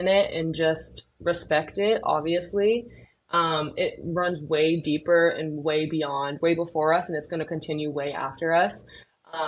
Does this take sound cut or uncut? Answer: uncut